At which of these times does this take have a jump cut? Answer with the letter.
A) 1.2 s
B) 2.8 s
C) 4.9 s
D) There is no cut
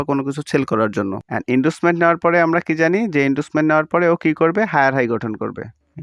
A